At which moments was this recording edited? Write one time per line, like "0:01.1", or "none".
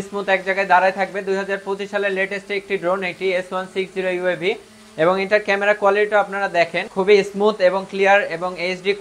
0:06.8